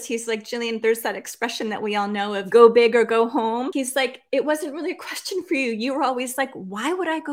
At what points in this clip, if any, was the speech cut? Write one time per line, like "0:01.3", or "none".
0:02.4
0:03.7